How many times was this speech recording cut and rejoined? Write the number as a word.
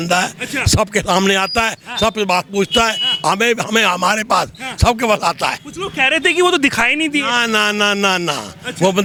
zero